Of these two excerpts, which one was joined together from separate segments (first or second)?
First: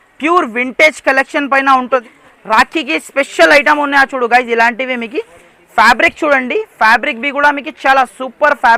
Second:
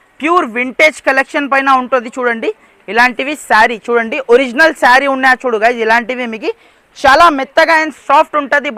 first